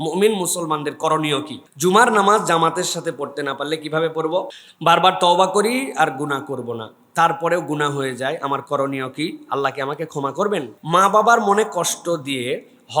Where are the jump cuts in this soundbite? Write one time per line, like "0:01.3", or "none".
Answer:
0:01.6
0:04.6
0:10.8